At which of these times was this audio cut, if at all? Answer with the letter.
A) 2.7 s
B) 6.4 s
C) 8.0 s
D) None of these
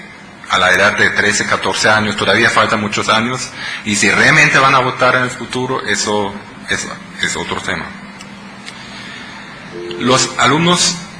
B